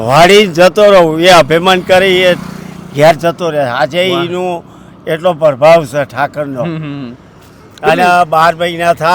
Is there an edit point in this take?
no; 0 cuts

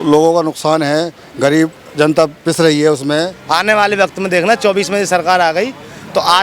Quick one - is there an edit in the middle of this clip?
yes; 1 cut; at 3.4 s

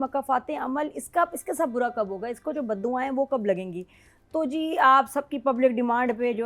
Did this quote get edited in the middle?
no; 0 cuts

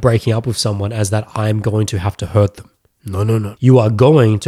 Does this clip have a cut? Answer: yes; 1 cut; at 3.5 s

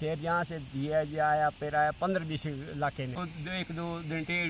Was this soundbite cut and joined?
yes; 1 cut; at 3.2 s

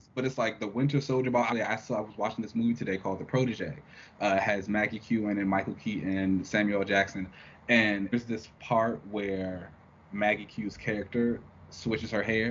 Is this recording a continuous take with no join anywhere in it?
no; 2 cuts; at 1.5 s, 8.1 s

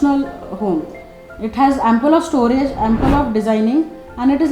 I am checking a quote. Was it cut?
no; 0 cuts

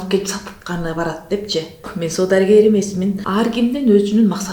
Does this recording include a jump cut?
yes; 2 cuts; at 2.0 s, 3.2 s

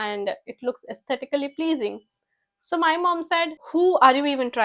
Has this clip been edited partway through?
yes; 1 cut; at 3.6 s

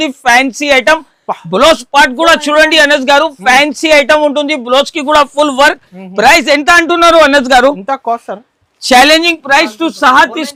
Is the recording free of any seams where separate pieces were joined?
yes; 0 cuts

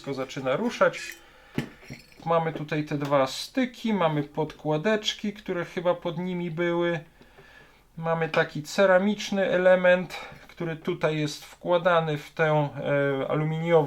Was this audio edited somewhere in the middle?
no; 0 cuts

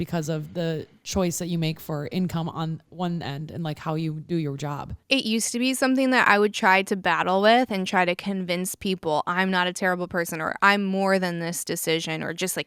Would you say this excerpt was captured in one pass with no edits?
no; 1 cut; at 4.9 s

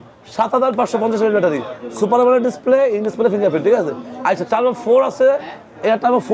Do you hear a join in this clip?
no; 0 cuts

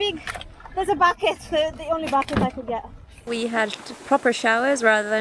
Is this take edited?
yes; 1 cut; at 3.2 s

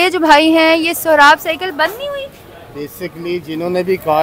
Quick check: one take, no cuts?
yes; 0 cuts

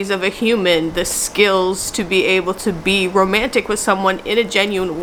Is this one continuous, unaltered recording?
yes; 0 cuts

